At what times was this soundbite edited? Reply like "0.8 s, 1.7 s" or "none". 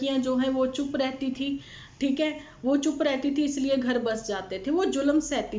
none